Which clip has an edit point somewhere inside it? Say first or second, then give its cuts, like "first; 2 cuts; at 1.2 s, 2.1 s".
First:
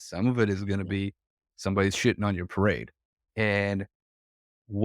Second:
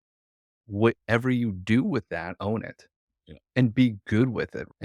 second; 1 cut; at 2.4 s